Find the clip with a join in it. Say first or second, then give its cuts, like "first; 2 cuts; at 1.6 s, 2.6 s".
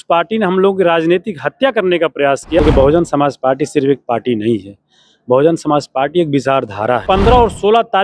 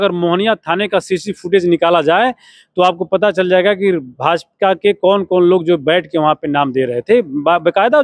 first; 2 cuts; at 2.6 s, 7.0 s